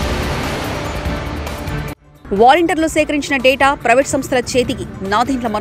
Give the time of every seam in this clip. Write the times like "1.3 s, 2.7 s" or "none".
2.1 s